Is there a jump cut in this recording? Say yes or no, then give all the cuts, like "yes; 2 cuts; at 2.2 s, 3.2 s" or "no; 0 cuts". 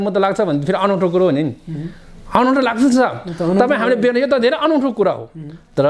no; 0 cuts